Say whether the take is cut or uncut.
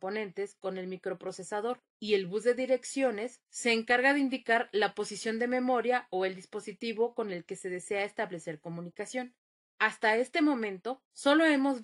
cut